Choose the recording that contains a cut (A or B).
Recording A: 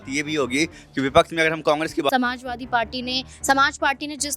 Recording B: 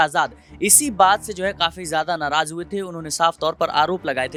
A